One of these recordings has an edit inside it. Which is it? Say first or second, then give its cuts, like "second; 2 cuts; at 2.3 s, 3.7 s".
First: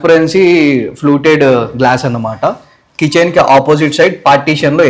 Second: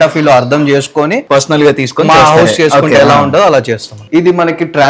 second; 2 cuts; at 1.2 s, 4.0 s